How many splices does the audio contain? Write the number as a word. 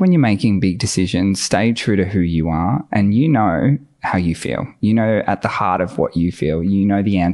zero